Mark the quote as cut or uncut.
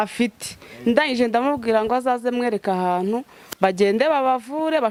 uncut